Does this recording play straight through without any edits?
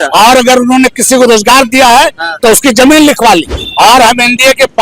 no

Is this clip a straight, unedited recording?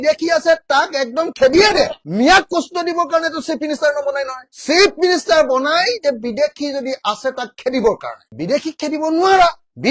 yes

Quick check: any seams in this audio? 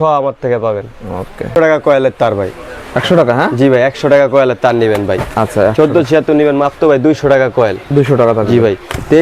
no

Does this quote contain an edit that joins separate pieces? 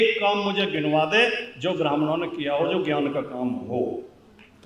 no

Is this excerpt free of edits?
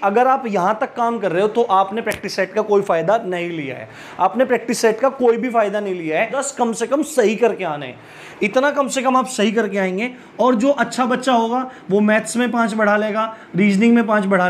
no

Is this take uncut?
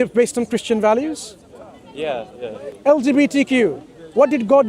no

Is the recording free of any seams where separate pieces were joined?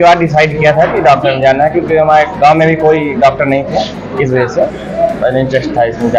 yes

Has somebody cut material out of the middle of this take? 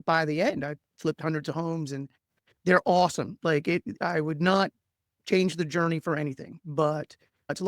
no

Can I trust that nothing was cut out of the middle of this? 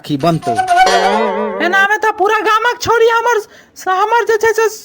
no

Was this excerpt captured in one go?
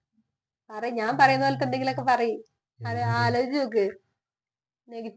yes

